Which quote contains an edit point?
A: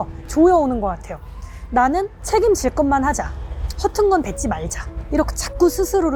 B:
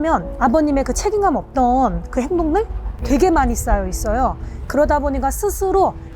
B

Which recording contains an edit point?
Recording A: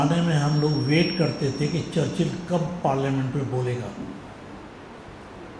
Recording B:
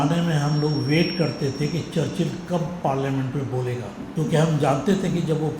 B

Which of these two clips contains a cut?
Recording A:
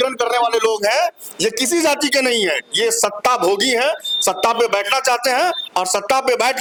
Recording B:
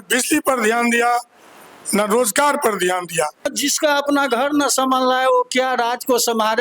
B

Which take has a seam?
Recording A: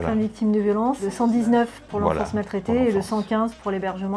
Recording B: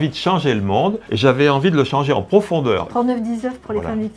B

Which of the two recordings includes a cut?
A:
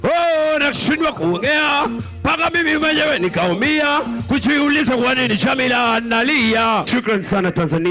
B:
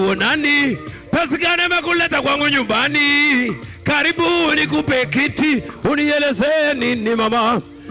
A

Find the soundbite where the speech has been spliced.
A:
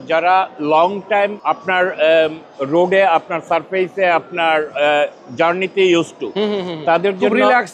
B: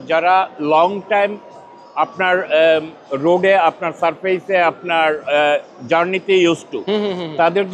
A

